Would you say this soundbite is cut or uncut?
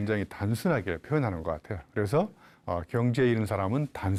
uncut